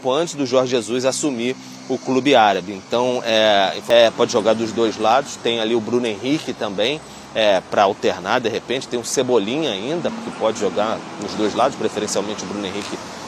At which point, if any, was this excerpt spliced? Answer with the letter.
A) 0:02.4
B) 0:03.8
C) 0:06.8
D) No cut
B